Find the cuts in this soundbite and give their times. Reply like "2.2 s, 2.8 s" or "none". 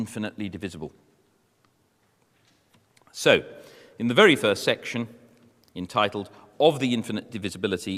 none